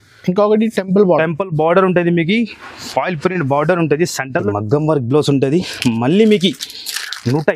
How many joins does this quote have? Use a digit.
1